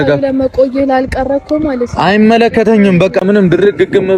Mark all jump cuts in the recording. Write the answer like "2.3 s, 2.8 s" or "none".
3.2 s